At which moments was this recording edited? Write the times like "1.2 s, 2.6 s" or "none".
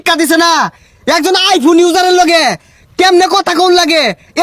none